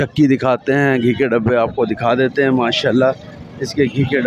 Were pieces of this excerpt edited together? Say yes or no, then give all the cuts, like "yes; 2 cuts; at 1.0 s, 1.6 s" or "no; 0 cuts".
no; 0 cuts